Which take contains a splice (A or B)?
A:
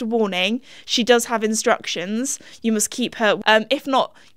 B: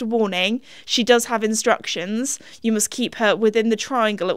A